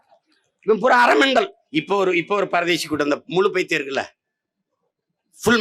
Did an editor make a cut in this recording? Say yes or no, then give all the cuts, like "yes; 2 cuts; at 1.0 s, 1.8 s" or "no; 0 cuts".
yes; 1 cut; at 1.6 s